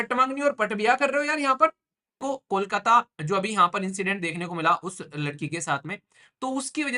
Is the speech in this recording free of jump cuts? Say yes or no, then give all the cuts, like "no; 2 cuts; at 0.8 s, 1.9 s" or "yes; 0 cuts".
no; 1 cut; at 2.2 s